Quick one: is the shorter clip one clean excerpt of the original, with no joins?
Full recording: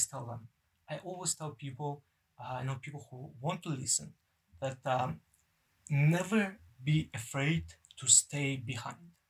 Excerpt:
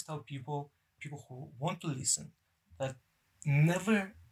no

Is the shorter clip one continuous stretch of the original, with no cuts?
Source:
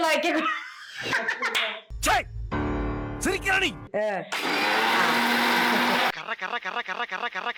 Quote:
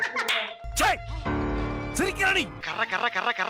no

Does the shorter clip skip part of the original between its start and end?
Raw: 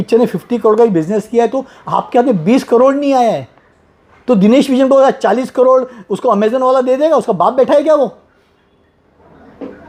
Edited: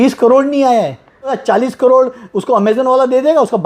yes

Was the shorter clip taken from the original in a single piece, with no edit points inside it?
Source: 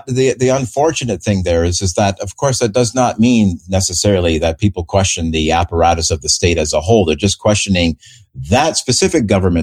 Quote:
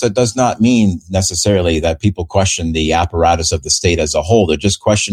yes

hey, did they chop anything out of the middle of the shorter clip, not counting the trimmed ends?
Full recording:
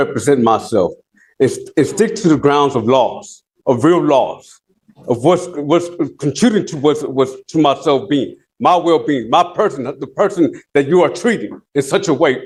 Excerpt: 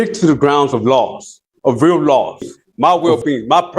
yes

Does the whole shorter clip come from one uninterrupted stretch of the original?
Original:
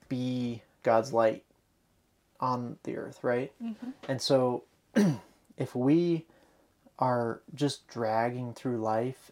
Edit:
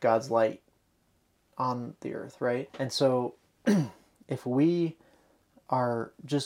no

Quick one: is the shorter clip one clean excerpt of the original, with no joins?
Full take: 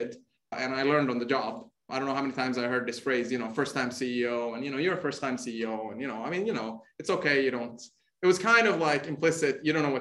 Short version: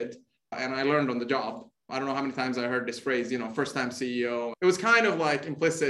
no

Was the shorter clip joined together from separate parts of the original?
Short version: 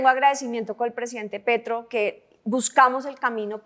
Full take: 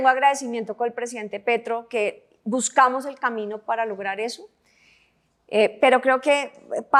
no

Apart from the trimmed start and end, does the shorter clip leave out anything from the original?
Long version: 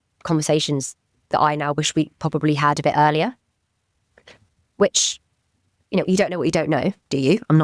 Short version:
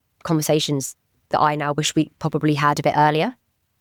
no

